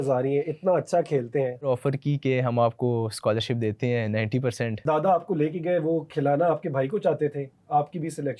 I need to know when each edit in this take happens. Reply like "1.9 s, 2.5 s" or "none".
1.7 s, 4.8 s